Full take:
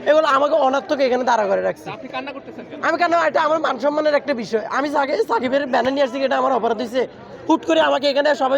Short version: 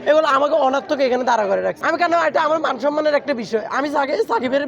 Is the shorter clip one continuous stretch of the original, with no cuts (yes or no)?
no